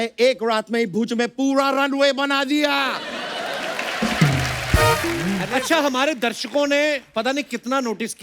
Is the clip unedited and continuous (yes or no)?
no